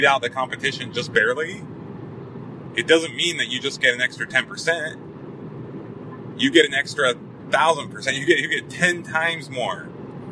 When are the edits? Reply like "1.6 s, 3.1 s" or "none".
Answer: none